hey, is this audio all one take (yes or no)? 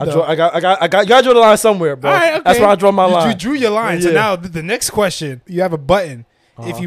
no